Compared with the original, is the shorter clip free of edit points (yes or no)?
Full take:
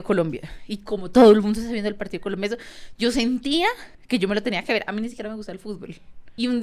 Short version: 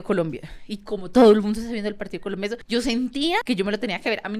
no